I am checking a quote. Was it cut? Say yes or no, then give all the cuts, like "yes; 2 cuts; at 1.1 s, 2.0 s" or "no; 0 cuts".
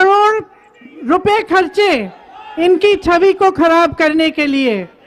no; 0 cuts